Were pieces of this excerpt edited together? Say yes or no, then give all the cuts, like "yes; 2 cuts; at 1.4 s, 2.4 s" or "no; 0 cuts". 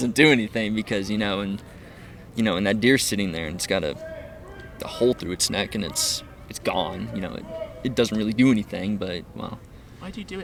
no; 0 cuts